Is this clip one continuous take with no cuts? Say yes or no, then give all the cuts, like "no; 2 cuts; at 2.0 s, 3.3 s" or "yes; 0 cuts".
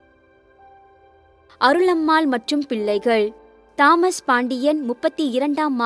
no; 1 cut; at 1.6 s